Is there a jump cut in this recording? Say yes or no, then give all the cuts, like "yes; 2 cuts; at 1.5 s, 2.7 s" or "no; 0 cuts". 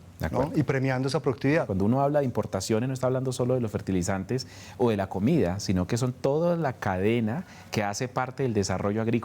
yes; 1 cut; at 1.7 s